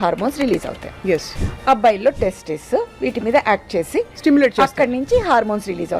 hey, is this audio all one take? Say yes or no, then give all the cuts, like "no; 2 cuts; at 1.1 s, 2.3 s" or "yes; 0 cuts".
no; 1 cut; at 1.4 s